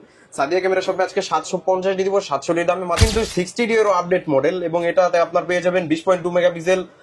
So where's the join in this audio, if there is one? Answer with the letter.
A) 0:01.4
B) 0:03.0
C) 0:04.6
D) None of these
B